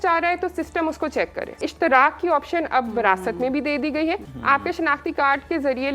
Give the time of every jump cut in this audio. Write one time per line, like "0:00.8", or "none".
0:01.6
0:04.3